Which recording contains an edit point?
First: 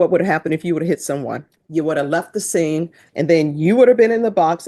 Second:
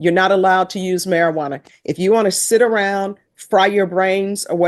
first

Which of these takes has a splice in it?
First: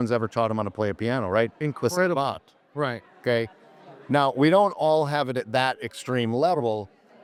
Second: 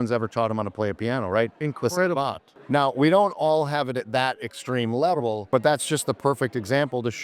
second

